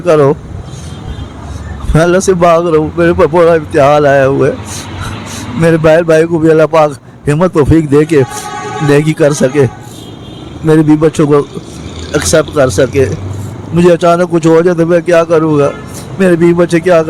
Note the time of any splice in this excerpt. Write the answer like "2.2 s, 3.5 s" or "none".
none

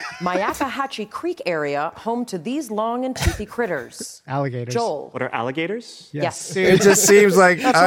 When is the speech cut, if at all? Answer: 6.5 s

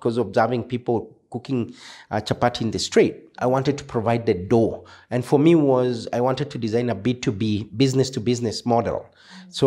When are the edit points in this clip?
none

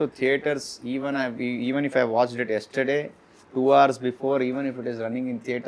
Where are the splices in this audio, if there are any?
none

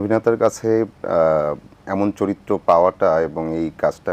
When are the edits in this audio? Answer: none

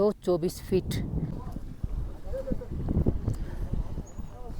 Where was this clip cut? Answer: 1.3 s

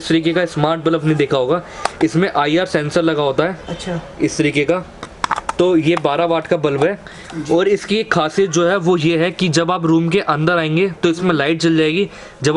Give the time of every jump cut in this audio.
none

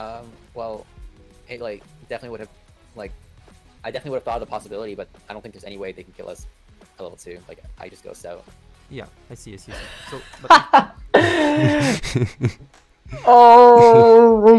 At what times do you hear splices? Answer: none

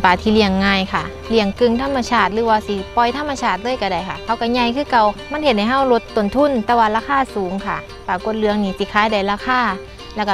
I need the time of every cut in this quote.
none

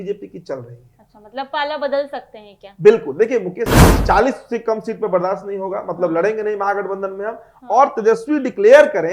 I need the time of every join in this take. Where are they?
4.0 s

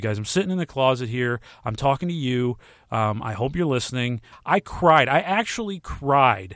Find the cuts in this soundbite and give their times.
4.3 s

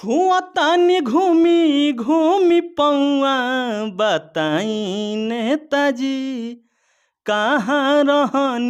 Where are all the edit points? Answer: none

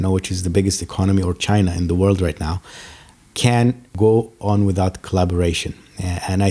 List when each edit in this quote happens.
3.9 s

